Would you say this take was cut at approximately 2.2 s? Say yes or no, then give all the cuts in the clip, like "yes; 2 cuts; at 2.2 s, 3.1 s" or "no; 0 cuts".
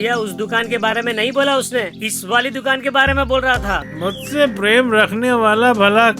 no; 1 cut; at 3.7 s